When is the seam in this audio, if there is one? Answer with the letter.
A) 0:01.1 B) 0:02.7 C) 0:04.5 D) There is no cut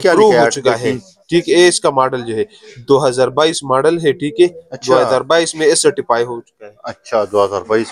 D